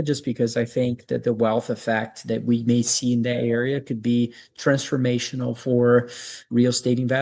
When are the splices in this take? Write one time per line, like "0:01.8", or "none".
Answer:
none